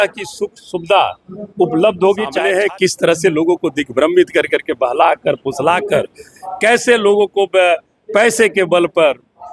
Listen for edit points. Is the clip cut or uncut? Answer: cut